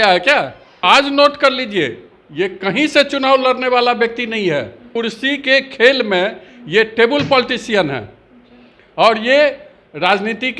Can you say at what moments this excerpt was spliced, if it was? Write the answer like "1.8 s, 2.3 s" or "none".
0.8 s, 4.9 s